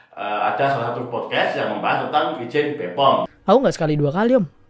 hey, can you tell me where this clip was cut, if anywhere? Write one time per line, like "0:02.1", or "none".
0:03.3